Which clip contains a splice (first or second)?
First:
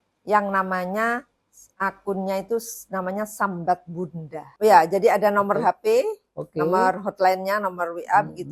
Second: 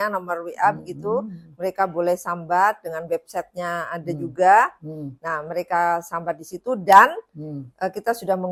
first